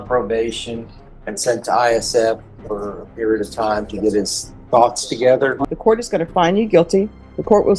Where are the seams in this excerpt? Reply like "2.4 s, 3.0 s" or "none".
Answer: 5.6 s